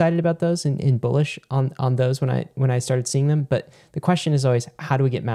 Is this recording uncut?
yes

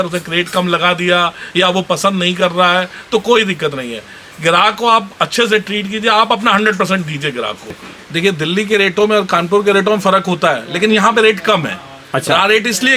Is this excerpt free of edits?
no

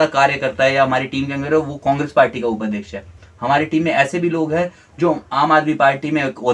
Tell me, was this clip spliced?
no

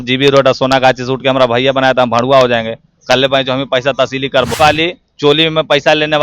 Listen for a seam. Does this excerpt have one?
yes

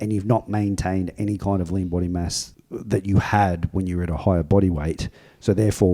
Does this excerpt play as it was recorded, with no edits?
yes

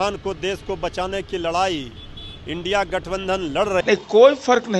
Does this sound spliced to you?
yes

